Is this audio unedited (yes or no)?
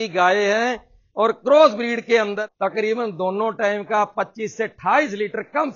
no